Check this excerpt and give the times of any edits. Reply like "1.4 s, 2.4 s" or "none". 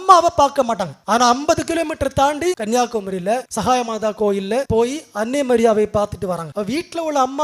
0.9 s, 2.6 s, 3.5 s, 4.7 s, 6.5 s